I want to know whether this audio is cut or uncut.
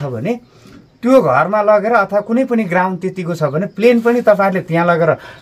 uncut